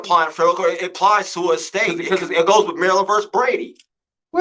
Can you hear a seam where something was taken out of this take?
yes; 1 cut; at 2.0 s

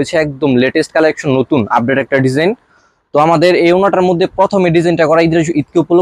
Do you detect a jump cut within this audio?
no; 0 cuts

